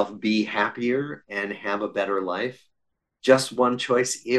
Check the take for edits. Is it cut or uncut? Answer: uncut